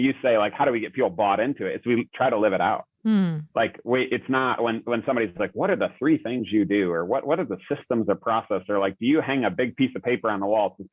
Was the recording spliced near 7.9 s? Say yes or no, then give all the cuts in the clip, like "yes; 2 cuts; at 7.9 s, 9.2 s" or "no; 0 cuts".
no; 0 cuts